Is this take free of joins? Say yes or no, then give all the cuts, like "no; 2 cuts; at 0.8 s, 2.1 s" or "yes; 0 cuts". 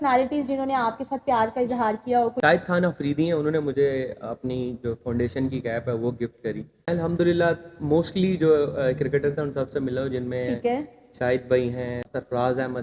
no; 3 cuts; at 2.3 s, 6.9 s, 12.1 s